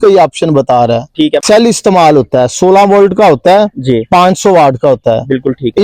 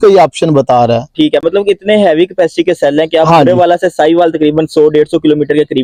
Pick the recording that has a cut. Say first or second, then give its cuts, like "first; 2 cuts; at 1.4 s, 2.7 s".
first; 1 cut; at 1.4 s